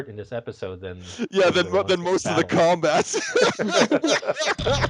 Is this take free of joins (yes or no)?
yes